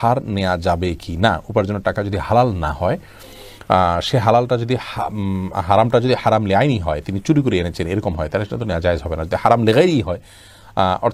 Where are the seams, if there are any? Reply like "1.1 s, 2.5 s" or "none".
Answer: none